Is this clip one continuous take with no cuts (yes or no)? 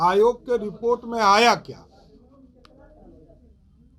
yes